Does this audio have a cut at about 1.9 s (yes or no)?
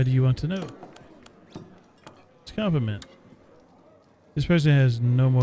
yes